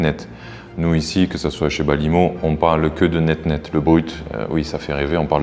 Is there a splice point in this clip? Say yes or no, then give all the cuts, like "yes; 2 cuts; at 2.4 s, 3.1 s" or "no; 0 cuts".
no; 0 cuts